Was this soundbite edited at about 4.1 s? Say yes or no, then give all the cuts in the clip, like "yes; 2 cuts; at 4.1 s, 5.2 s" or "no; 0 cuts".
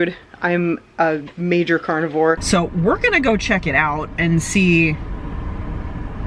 no; 1 cut; at 2.4 s